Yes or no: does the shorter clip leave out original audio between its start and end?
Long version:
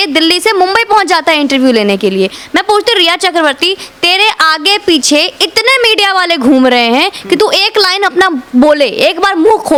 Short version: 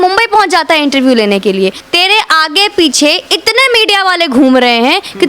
yes